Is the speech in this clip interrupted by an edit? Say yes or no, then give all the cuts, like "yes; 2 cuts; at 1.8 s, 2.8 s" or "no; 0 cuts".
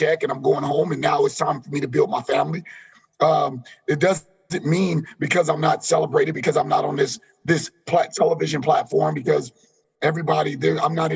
no; 0 cuts